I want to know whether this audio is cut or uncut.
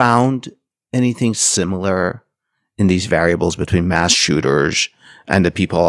uncut